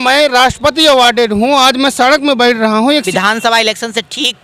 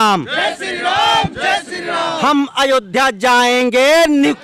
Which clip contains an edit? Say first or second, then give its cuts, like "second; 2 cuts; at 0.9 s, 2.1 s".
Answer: first; 1 cut; at 3.1 s